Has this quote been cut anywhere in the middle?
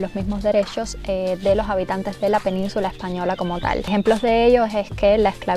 no; 0 cuts

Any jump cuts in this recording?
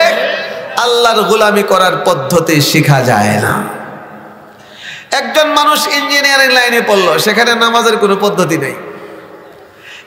no; 0 cuts

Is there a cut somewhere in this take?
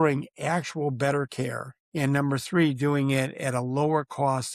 no; 0 cuts

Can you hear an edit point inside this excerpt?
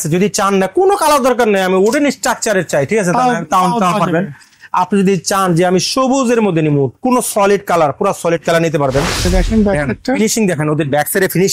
yes; 1 cut; at 9.2 s

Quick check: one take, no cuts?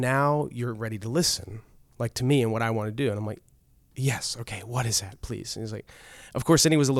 yes; 0 cuts

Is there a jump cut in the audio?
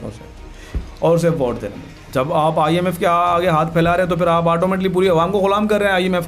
yes; 1 cut; at 2.0 s

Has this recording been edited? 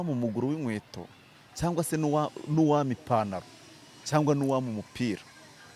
no; 0 cuts

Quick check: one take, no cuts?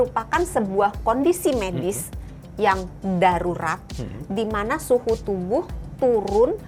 yes; 0 cuts

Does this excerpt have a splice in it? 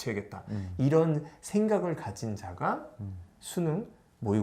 no; 0 cuts

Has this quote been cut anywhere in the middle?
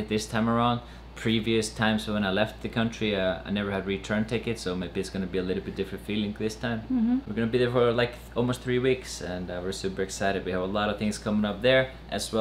no; 0 cuts

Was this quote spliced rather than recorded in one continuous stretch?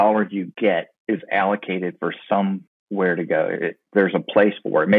yes; 2 cuts; at 0.9 s, 2.7 s

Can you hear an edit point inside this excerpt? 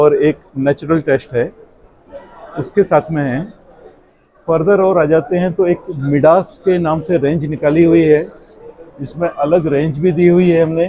no; 0 cuts

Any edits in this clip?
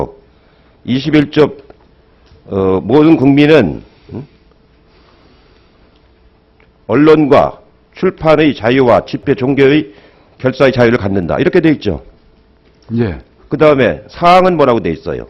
yes; 1 cut; at 9.9 s

